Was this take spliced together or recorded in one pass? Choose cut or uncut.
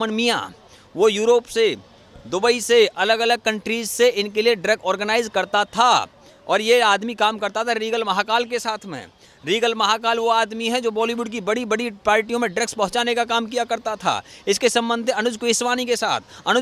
uncut